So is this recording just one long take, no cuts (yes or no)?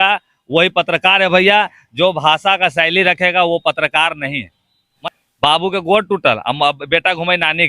no